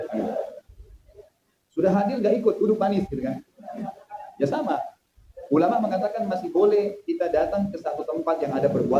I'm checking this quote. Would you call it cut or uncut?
uncut